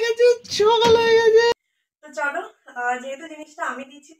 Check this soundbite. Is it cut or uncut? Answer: cut